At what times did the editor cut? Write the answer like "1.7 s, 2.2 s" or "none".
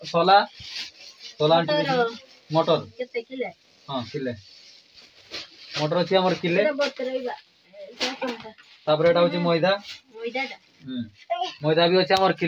none